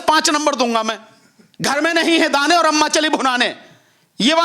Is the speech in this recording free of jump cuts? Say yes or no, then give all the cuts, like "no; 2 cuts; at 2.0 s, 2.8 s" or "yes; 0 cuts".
no; 1 cut; at 1.5 s